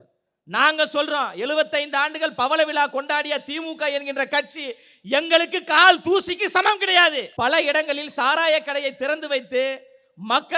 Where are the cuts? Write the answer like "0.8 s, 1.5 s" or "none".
7.3 s